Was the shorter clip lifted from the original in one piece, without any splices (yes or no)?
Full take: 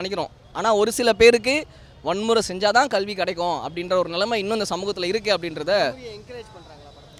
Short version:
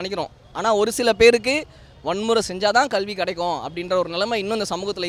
yes